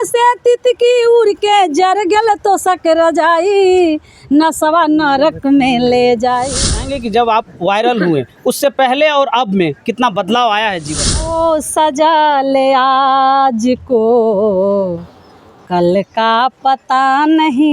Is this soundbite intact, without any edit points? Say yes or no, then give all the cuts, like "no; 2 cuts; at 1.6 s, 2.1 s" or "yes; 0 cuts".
no; 2 cuts; at 6.6 s, 11.3 s